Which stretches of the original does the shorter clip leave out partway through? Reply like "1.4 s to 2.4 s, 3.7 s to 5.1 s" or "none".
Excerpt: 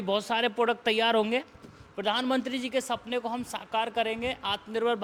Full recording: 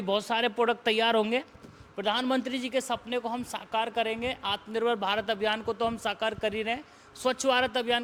none